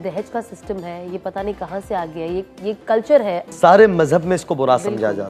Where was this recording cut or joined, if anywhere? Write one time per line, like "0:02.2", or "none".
0:03.4

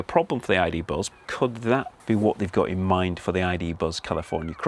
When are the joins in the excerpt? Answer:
0:01.1
0:01.9

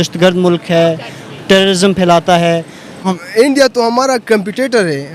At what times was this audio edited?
0:02.9

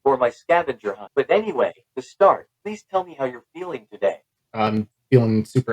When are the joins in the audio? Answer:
0:01.0
0:02.5
0:04.3

